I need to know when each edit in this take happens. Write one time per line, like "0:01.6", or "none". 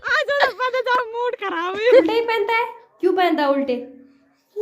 0:02.0

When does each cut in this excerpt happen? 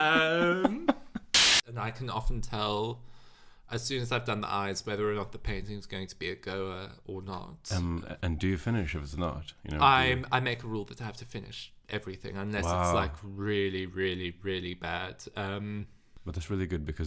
0:01.6
0:16.2

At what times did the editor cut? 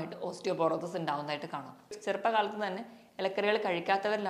0:01.9

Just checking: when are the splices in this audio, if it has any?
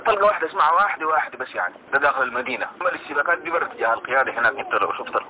0:01.8

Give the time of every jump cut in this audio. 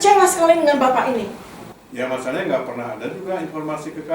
0:01.6

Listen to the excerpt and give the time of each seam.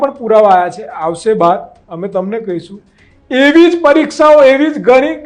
none

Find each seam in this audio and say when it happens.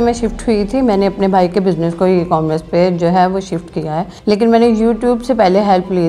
0:04.1

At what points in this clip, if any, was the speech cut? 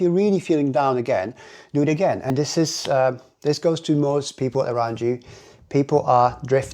0:02.3

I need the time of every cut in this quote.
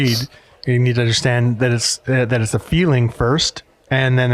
none

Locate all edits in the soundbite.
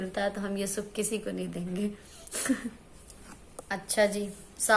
none

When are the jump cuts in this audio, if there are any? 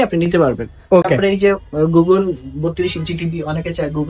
none

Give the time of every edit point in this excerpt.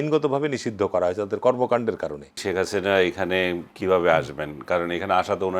0:02.4

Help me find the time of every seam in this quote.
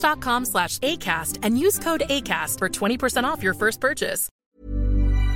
0:04.3

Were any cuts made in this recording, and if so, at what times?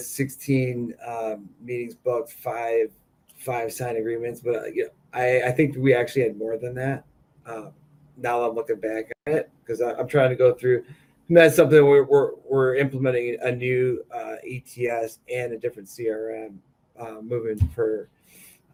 none

